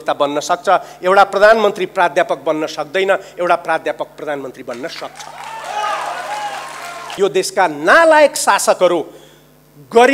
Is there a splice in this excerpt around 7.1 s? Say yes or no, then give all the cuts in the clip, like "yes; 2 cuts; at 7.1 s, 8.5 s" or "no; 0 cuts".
yes; 1 cut; at 7.1 s